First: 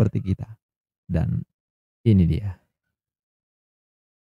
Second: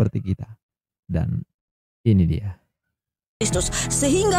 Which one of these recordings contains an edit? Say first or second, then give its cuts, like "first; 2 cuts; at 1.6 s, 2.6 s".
second; 1 cut; at 3.4 s